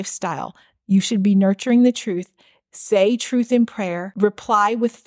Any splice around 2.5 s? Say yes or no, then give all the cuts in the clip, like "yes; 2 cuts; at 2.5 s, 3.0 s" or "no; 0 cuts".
no; 1 cut; at 4.0 s